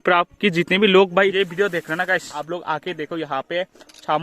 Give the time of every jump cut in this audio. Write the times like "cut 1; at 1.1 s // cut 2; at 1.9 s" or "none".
cut 1; at 1.3 s // cut 2; at 2.3 s